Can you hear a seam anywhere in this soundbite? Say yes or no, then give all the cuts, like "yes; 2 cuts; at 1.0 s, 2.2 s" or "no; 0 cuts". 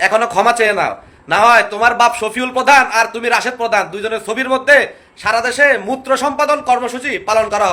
no; 0 cuts